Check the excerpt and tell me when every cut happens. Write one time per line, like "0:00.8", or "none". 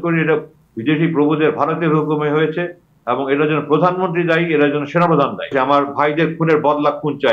0:05.5